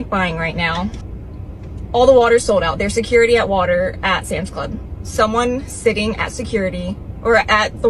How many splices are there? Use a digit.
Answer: 1